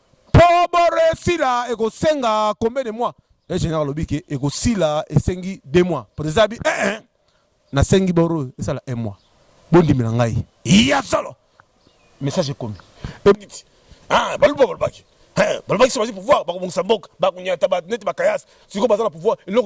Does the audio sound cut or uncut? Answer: cut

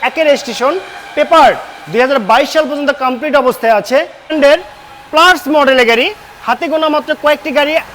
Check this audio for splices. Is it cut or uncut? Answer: cut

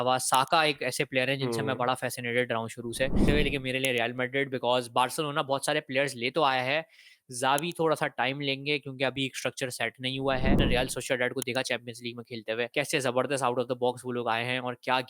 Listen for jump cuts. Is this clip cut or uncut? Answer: cut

